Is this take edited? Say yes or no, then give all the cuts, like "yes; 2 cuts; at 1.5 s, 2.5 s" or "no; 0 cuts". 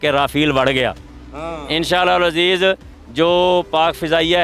no; 0 cuts